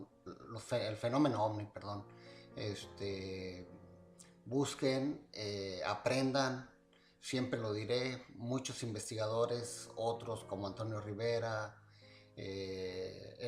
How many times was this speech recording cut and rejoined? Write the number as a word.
one